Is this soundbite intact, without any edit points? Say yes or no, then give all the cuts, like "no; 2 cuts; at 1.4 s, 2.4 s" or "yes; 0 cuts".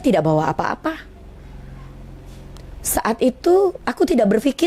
yes; 0 cuts